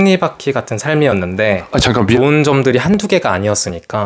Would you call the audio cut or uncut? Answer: cut